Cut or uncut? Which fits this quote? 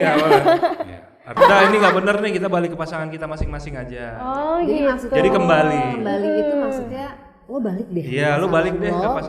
cut